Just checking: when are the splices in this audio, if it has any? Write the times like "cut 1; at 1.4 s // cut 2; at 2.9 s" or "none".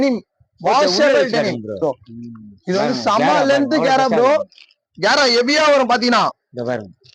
cut 1; at 1.8 s